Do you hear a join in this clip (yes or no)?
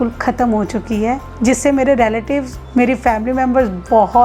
yes